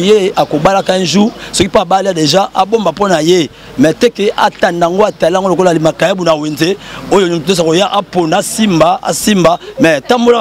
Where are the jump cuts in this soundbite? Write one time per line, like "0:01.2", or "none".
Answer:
none

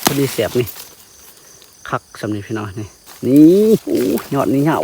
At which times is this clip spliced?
0:03.0
0:03.8

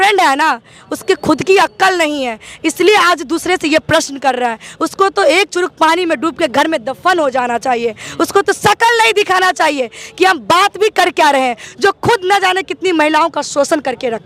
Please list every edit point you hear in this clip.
none

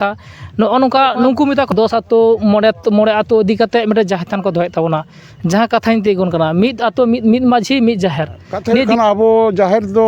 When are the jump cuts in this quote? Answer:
0:01.7
0:08.9

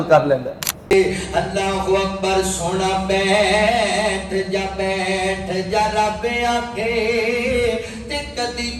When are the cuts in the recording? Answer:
0:00.9

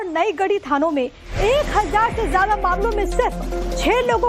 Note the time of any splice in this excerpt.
none

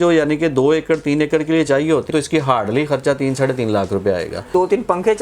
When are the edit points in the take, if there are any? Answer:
0:02.1
0:04.5

